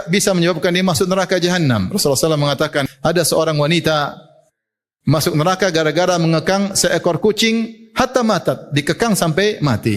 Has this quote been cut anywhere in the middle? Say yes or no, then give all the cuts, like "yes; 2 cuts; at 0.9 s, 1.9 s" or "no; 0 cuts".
yes; 1 cut; at 2.9 s